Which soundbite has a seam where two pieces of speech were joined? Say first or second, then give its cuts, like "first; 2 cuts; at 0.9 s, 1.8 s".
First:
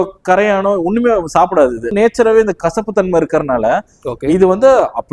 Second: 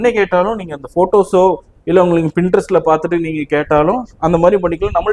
first; 1 cut; at 1.9 s